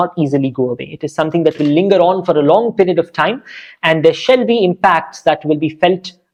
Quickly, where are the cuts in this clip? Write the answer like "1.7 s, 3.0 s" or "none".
none